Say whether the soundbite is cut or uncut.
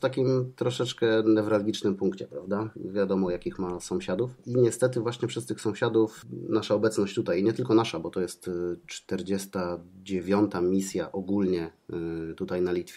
cut